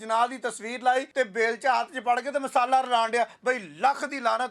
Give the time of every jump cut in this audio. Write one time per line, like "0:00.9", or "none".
0:01.1